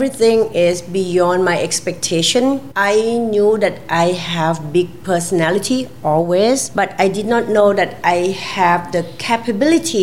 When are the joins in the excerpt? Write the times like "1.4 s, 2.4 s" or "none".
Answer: 2.7 s, 6.7 s